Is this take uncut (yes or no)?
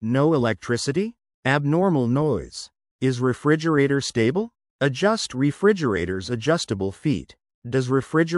no